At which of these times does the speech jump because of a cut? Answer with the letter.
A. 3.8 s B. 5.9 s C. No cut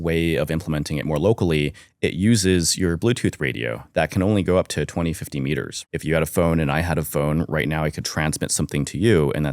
B